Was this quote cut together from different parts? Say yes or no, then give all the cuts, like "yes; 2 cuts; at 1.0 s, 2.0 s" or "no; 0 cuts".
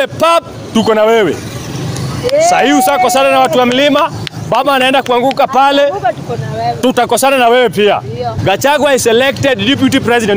yes; 1 cut; at 8.3 s